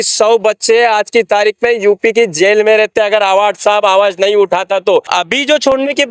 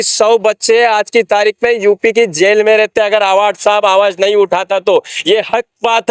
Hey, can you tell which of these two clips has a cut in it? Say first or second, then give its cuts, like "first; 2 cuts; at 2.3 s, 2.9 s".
first; 1 cut; at 5.1 s